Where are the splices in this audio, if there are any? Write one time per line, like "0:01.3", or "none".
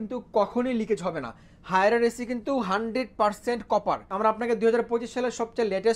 0:04.1

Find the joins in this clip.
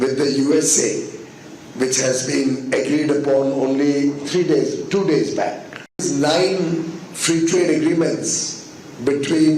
0:06.0

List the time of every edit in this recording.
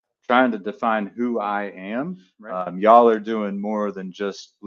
0:02.3

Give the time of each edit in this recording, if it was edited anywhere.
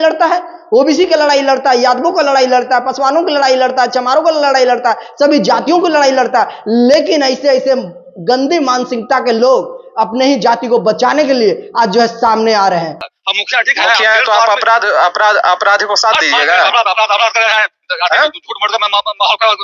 0:13.0

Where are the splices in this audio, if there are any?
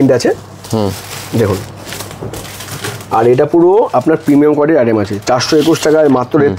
none

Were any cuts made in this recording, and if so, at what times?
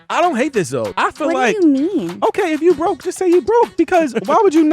0:00.9

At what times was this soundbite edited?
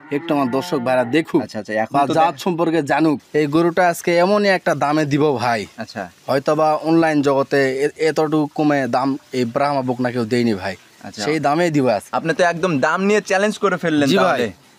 0:03.2
0:12.1

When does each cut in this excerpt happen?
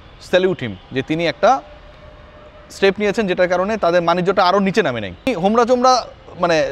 0:05.3

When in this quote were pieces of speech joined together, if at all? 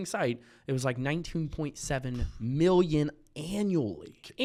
none

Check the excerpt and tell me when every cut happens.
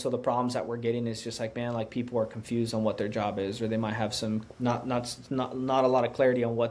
0:04.5

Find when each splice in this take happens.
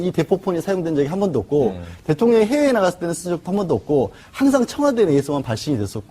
0:01.8

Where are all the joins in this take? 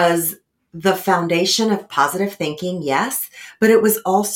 0:01.9

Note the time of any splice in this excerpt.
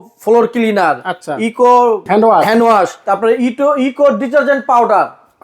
0:02.0
0:03.0

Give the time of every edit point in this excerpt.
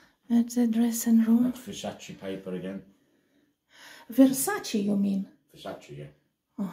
none

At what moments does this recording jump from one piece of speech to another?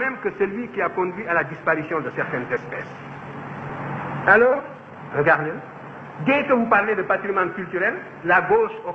0:03.6

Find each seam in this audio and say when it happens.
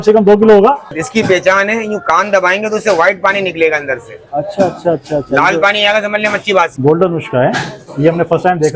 0:01.0
0:06.7

